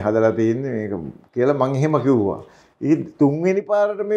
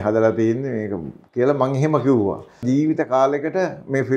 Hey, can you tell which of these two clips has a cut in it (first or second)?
second